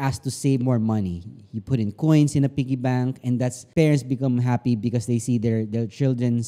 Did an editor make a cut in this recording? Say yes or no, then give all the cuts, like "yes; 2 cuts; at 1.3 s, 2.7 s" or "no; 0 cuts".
no; 0 cuts